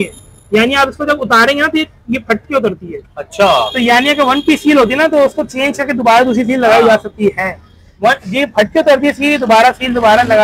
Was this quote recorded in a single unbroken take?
yes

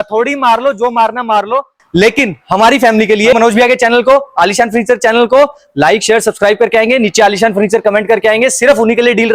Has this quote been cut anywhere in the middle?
yes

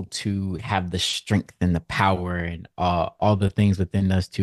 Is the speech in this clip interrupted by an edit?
yes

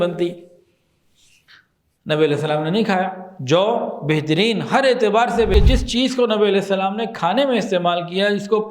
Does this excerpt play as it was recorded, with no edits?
no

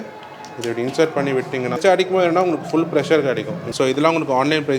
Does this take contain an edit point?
yes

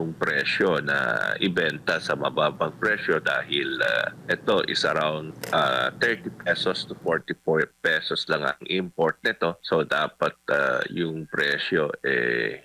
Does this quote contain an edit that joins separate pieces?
yes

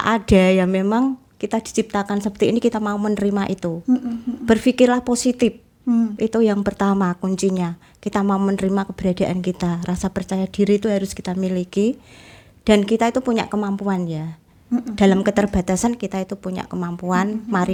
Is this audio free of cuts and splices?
yes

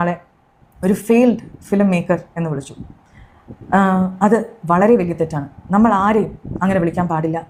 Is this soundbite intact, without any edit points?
yes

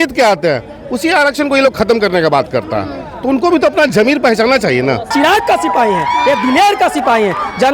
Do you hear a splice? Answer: yes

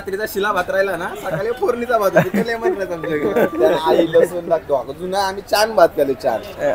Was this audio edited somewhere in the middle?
yes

